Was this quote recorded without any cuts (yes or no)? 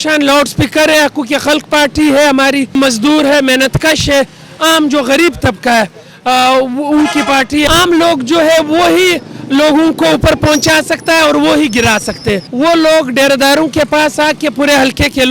no